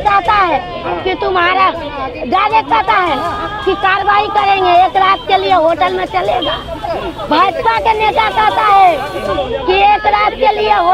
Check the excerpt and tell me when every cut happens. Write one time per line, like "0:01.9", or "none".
none